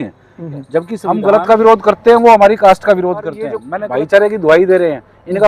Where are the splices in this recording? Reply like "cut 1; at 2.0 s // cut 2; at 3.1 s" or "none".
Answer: cut 1; at 0.9 s // cut 2; at 3.6 s